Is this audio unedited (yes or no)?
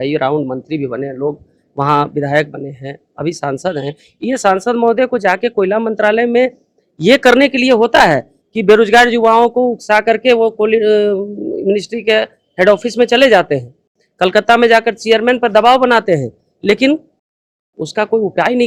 yes